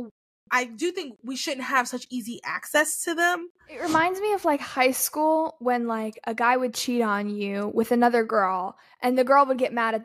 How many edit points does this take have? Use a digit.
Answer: 1